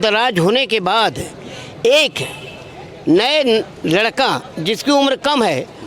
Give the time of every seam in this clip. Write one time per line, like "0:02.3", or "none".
none